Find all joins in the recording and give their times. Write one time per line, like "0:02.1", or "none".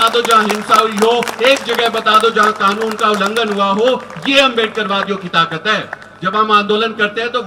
none